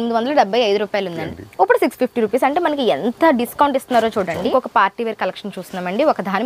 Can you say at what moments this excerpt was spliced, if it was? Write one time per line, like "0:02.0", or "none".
0:01.2
0:04.5